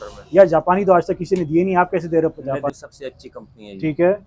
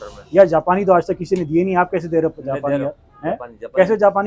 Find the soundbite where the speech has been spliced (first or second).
first